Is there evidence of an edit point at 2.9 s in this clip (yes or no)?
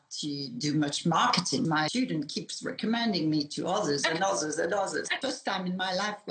no